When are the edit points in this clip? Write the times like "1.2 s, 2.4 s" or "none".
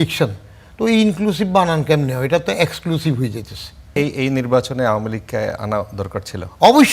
3.9 s